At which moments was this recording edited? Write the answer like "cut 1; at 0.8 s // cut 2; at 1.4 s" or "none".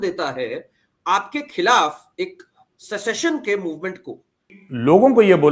cut 1; at 4.6 s

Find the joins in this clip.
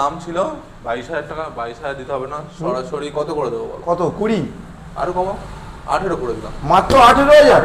none

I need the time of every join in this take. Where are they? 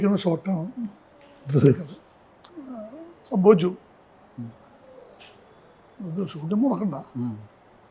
cut 1; at 2.4 s

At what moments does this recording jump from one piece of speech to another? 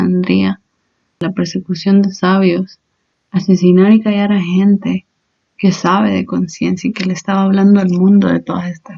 cut 1; at 1.2 s

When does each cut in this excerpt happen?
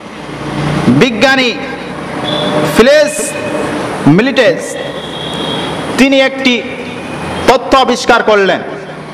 none

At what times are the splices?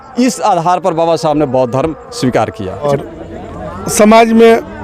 cut 1; at 2.9 s

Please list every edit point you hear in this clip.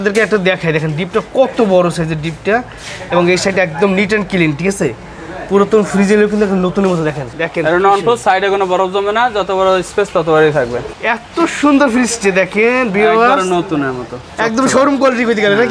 cut 1; at 7.3 s // cut 2; at 10.9 s

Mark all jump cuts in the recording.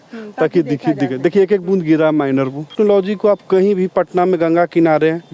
cut 1; at 2.7 s

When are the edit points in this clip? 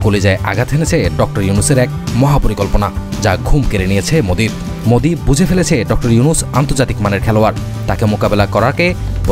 none

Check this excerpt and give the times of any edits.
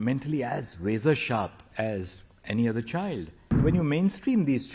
cut 1; at 3.5 s

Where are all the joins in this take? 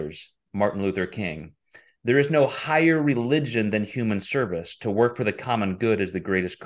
none

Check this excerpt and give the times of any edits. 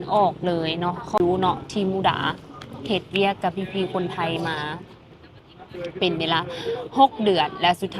cut 1; at 1.2 s

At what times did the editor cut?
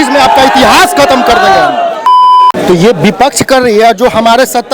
cut 1; at 2.1 s

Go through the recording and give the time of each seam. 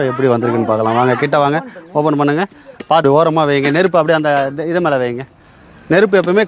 cut 1; at 3.0 s

